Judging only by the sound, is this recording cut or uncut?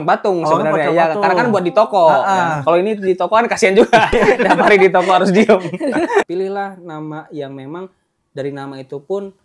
cut